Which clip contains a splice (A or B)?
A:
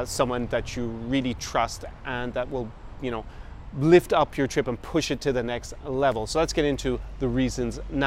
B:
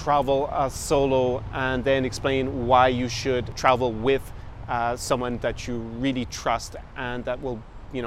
B